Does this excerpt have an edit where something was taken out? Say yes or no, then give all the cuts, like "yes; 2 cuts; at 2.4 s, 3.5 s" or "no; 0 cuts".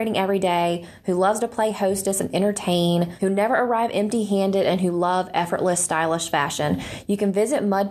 yes; 1 cut; at 3.1 s